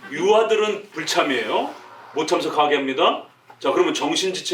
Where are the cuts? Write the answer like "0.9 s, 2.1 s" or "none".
0.9 s